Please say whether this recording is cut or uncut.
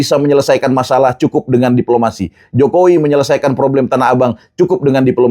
uncut